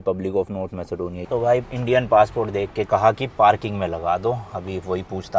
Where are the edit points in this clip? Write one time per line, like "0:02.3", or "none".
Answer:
0:01.2